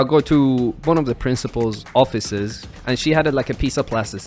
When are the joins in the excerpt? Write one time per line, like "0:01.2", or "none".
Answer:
0:01.8
0:02.7